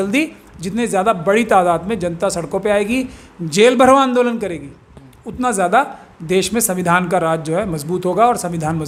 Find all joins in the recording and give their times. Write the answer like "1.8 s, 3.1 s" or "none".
none